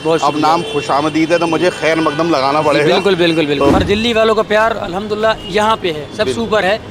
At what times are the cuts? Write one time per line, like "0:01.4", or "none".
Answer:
0:03.7